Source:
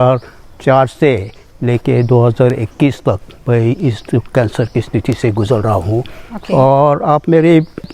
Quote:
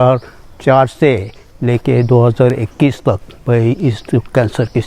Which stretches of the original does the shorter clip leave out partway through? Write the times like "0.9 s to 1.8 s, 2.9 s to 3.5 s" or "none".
none